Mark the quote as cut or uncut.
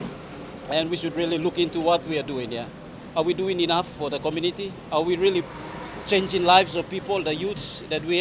uncut